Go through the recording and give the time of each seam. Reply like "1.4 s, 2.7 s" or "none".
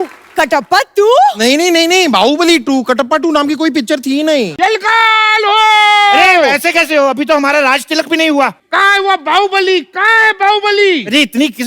4.5 s, 8.6 s

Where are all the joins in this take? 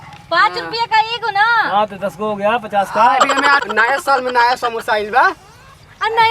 3.6 s

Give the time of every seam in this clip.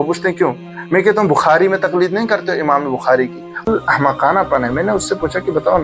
3.7 s

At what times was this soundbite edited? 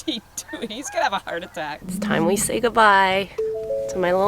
1.8 s

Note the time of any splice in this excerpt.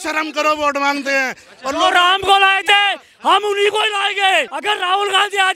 4.5 s

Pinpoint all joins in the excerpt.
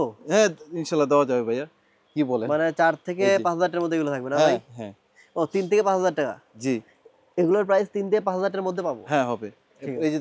none

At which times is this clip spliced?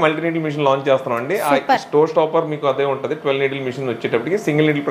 none

